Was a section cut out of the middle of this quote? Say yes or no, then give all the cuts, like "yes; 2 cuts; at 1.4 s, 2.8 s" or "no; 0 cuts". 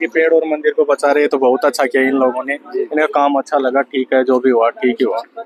no; 0 cuts